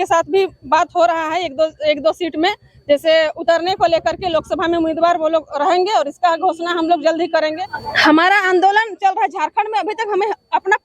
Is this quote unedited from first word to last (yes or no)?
no